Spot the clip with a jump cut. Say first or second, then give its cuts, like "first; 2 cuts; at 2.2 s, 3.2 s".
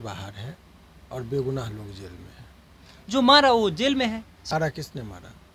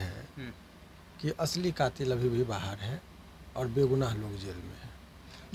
first; 1 cut; at 4.5 s